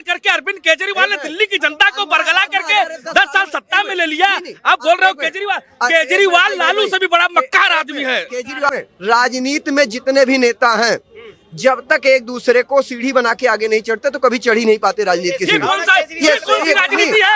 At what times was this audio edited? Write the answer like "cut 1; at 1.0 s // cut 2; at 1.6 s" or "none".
cut 1; at 8.7 s